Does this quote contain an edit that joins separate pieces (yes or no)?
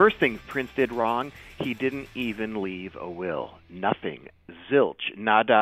no